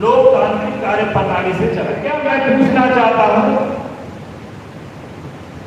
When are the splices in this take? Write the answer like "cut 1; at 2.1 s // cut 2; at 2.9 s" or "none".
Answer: cut 1; at 2.1 s